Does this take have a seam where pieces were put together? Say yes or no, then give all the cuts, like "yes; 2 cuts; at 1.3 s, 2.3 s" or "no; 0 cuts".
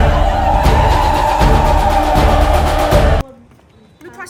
no; 0 cuts